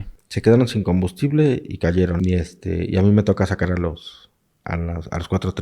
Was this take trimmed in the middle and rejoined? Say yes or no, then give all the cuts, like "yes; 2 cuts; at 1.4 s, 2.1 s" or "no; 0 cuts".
yes; 1 cut; at 2.1 s